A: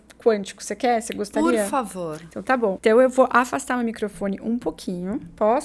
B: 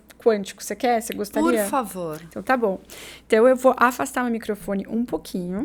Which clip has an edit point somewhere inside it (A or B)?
A